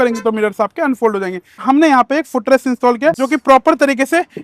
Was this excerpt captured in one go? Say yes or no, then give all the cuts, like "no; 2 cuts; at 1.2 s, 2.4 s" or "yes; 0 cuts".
no; 2 cuts; at 1.6 s, 3.1 s